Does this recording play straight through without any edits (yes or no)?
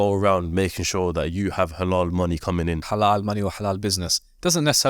no